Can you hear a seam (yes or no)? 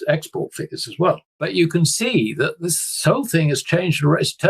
yes